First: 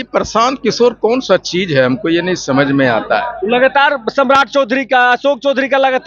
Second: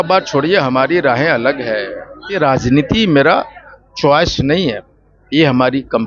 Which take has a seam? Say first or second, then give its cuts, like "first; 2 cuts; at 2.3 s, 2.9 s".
second; 1 cut; at 2.4 s